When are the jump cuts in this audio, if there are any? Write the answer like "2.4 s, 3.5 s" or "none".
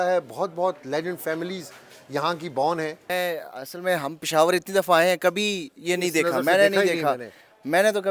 3.1 s